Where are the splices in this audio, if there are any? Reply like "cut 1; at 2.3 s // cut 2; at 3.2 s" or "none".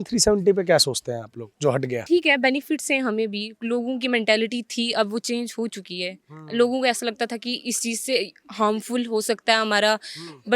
cut 1; at 2.0 s